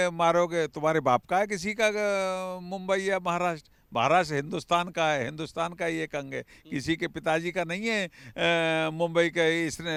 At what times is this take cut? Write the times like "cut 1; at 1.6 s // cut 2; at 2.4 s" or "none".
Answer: none